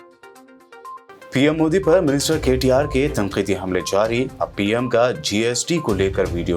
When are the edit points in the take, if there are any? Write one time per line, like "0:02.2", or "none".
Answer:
none